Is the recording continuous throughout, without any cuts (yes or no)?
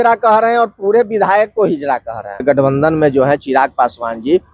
no